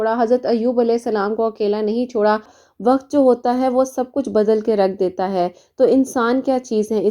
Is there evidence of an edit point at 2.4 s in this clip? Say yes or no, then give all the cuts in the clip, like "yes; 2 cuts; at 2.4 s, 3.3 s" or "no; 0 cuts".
yes; 1 cut; at 2.4 s